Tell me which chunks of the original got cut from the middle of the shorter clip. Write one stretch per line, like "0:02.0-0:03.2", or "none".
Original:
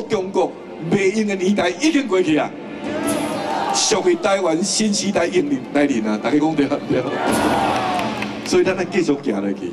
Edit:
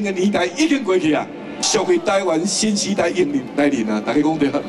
0:02.9-0:03.8